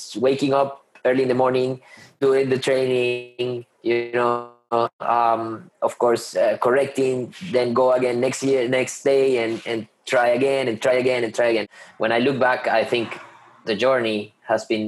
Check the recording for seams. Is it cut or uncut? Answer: cut